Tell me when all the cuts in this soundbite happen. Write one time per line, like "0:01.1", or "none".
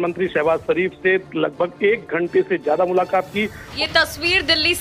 0:03.7